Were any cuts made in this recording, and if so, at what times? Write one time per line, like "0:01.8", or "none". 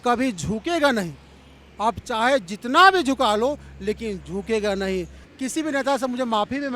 0:05.2